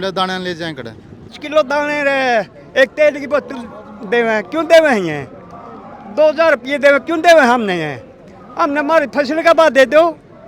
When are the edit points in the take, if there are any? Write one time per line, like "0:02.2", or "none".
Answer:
0:01.4